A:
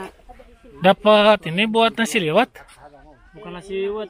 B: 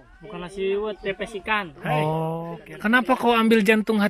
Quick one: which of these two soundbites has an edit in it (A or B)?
B